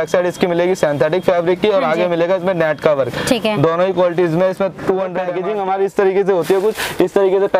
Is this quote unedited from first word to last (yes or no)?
no